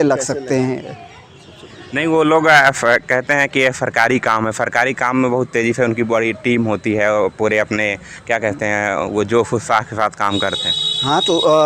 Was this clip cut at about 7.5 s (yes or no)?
no